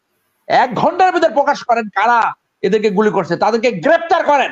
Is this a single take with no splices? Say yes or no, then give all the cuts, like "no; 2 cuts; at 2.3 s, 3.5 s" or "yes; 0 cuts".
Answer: yes; 0 cuts